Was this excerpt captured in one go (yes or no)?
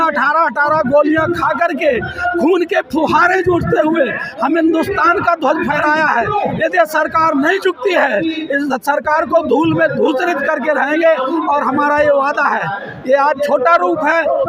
yes